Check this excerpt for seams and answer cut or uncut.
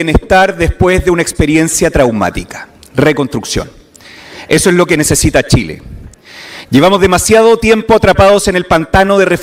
uncut